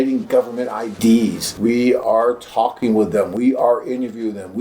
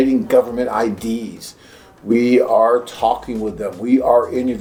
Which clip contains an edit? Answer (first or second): first